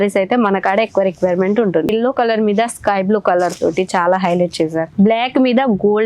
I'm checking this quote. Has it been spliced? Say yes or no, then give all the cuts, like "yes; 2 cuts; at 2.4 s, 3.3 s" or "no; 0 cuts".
yes; 2 cuts; at 1.9 s, 4.9 s